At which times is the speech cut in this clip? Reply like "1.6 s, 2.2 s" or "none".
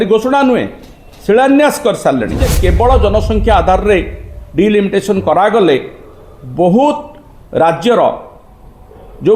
2.5 s